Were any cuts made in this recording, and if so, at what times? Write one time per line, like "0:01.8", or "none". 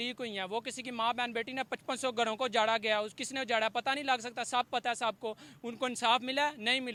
none